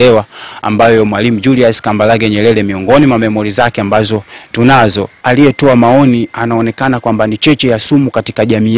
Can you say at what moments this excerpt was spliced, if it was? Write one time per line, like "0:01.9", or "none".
0:05.2